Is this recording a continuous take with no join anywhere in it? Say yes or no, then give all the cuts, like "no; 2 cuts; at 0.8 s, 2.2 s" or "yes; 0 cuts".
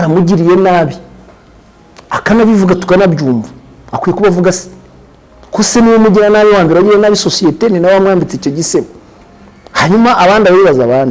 yes; 0 cuts